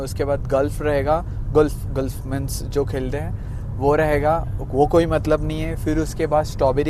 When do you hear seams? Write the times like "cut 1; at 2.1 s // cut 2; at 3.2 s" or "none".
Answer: none